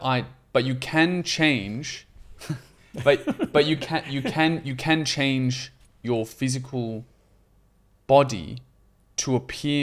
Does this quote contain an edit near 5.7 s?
no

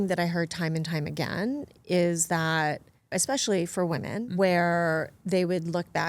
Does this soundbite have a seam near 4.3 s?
yes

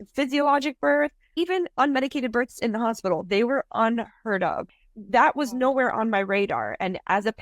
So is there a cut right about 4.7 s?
yes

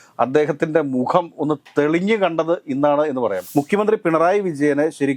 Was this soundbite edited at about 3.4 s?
yes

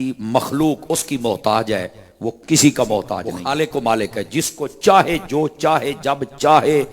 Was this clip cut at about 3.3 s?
yes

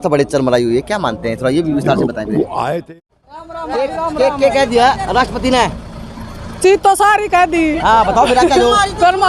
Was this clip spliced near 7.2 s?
no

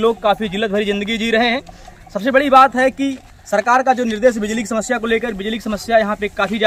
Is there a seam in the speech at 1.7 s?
no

